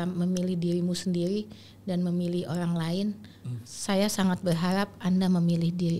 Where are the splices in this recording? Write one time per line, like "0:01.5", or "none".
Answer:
none